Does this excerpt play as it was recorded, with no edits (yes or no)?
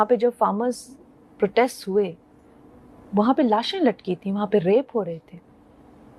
yes